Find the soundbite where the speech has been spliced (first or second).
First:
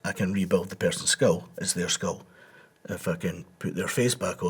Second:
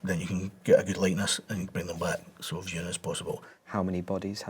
second